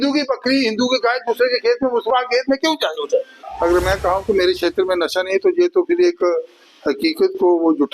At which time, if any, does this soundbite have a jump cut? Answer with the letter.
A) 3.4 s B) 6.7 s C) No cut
A